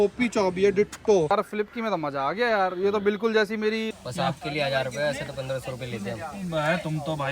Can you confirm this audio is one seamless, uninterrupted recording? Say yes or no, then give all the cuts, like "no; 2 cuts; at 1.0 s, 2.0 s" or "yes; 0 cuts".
no; 2 cuts; at 1.3 s, 4.0 s